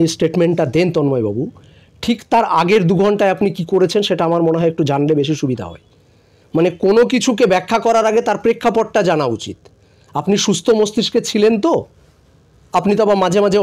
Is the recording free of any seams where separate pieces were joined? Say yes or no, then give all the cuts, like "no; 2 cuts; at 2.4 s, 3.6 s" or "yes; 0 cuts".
yes; 0 cuts